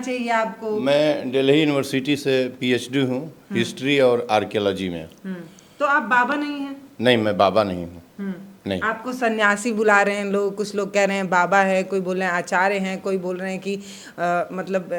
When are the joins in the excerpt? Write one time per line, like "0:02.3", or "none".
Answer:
none